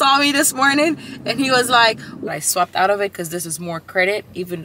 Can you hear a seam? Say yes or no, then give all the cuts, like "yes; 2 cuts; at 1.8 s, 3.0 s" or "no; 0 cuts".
yes; 1 cut; at 2.2 s